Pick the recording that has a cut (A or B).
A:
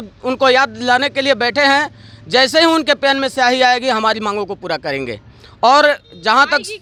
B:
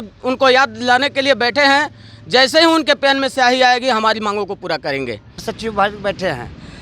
B